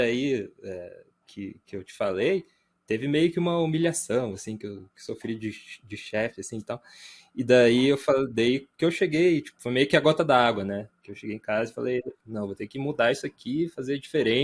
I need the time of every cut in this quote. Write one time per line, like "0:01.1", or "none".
none